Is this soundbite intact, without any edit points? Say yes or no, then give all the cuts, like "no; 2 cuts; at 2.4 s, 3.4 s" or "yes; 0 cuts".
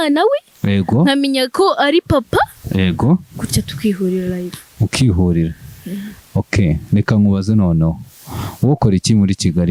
yes; 0 cuts